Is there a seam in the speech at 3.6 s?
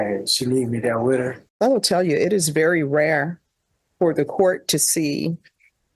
no; 1 cut; at 1.4 s

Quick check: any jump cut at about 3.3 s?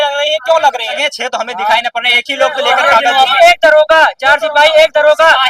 yes; 2 cuts; at 1.0 s, 3.3 s

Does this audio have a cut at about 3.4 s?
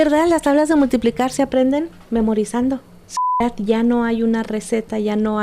yes; 1 cut; at 3.4 s

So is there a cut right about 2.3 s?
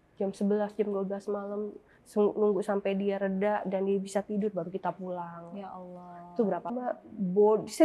no; 1 cut; at 6.7 s

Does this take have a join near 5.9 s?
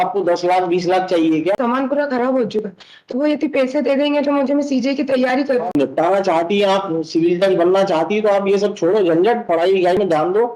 yes; 2 cuts; at 1.5 s, 5.9 s

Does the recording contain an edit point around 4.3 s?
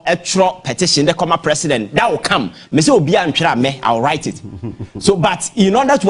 no; 0 cuts

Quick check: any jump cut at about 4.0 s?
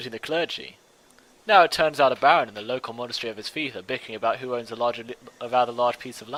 no; 0 cuts

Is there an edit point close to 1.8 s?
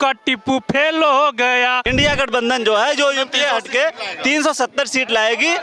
yes; 1 cut; at 1.8 s

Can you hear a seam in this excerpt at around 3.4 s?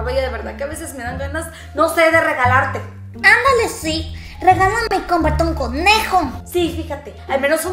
no; 0 cuts

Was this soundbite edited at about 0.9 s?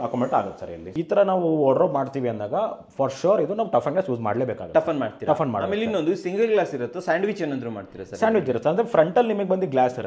yes; 1 cut; at 0.9 s

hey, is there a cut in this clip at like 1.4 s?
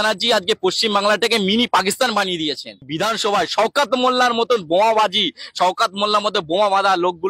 no; 1 cut; at 2.9 s

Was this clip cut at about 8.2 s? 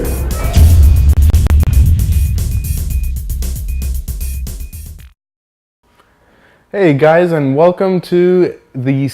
no; 1 cut; at 2.0 s

